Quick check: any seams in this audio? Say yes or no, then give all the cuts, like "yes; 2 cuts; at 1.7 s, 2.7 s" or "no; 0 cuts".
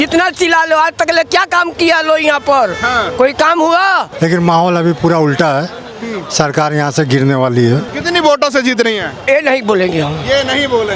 yes; 2 cuts; at 4.1 s, 7.9 s